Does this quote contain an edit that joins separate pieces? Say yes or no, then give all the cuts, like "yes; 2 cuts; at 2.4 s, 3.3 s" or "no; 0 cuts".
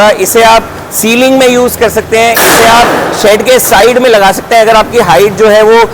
no; 0 cuts